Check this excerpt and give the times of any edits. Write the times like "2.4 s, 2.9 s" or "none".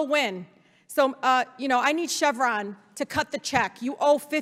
none